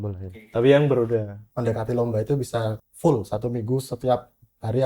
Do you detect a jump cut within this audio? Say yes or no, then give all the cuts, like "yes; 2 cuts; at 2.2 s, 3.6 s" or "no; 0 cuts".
yes; 2 cuts; at 1.4 s, 2.8 s